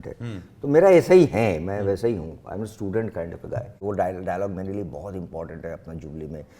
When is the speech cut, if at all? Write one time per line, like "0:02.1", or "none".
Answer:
0:03.8